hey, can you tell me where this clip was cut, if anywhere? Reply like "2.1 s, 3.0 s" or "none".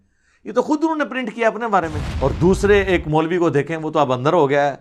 2.0 s